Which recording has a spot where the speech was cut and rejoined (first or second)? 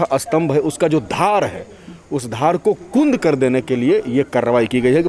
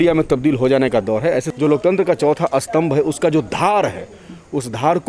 second